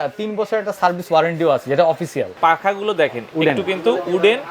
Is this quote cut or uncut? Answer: cut